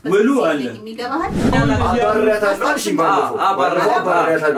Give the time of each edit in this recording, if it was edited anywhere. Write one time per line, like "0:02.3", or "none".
0:01.5